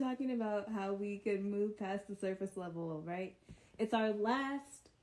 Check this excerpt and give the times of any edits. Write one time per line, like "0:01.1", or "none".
none